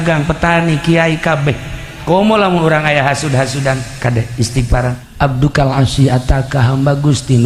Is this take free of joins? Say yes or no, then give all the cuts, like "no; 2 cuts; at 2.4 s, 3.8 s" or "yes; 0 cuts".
no; 1 cut; at 5.0 s